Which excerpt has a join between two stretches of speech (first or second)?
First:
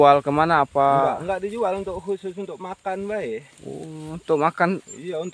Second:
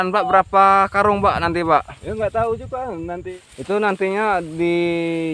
second